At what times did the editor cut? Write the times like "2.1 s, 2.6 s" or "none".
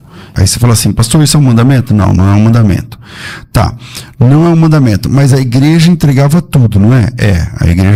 none